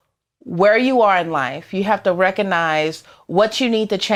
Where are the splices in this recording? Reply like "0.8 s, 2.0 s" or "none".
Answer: none

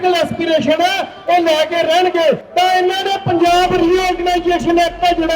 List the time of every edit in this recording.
2.4 s

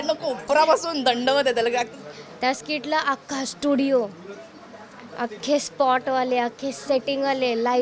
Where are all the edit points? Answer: 1.9 s

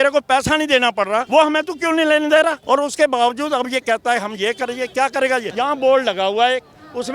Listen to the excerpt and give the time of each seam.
1.2 s, 2.6 s, 5.5 s

